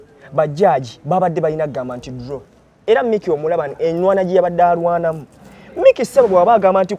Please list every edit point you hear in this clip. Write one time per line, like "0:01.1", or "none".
0:02.7